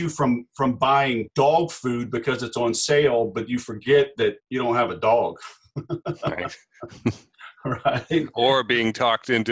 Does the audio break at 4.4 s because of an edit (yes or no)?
yes